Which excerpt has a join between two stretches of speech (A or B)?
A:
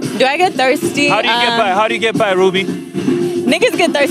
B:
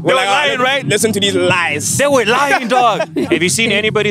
B